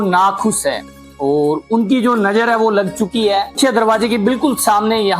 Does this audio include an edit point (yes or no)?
yes